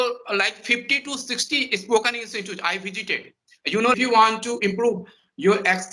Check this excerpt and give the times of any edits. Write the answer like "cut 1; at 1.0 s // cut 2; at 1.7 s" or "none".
cut 1; at 3.9 s

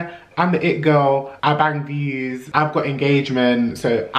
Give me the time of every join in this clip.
cut 1; at 1.3 s // cut 2; at 2.4 s

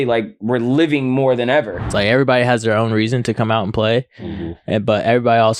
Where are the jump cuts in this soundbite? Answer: cut 1; at 1.9 s

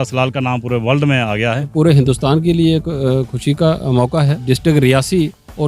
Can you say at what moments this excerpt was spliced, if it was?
cut 1; at 1.4 s // cut 2; at 4.4 s

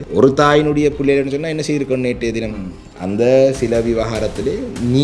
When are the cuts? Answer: none

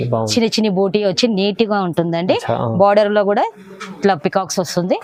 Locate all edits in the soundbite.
none

